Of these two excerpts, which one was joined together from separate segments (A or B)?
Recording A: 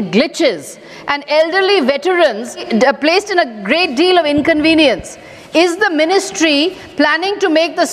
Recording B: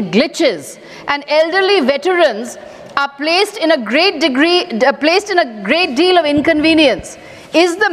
A